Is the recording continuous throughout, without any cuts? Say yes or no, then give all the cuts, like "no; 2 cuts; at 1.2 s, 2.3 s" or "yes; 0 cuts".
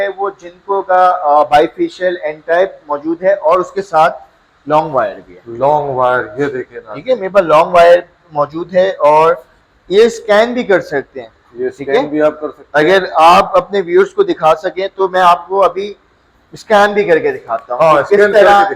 yes; 0 cuts